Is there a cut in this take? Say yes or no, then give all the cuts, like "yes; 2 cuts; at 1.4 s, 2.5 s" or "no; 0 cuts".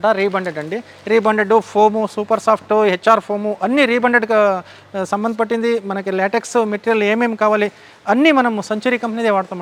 no; 0 cuts